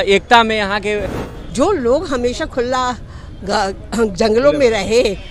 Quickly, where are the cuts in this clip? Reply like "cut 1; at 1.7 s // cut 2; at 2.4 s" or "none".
cut 1; at 1.0 s